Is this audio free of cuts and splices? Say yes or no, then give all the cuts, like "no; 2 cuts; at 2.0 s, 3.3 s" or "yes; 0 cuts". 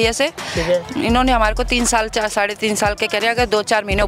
yes; 0 cuts